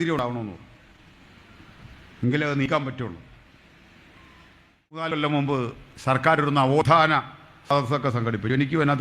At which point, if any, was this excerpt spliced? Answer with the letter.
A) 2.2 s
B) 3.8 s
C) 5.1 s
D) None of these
C